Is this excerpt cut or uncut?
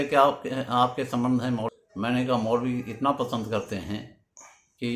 cut